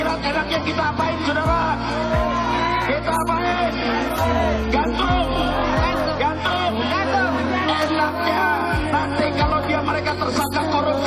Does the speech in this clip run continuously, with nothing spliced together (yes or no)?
yes